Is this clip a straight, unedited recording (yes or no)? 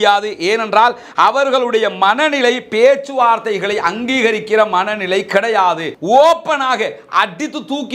no